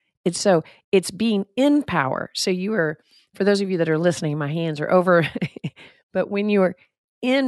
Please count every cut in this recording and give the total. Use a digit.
1